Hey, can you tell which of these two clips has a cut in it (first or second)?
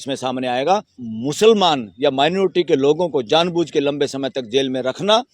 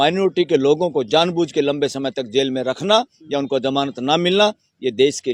first